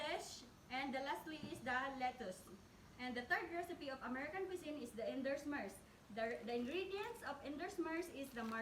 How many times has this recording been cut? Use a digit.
1